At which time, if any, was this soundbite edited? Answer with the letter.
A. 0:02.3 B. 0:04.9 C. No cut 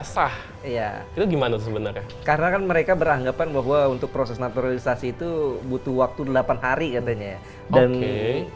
C